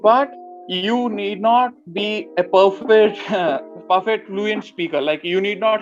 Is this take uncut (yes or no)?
yes